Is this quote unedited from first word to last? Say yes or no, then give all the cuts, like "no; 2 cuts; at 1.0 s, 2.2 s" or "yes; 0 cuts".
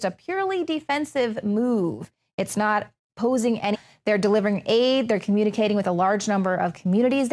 yes; 0 cuts